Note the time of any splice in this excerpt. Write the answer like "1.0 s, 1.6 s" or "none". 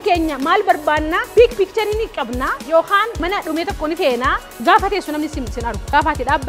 4.5 s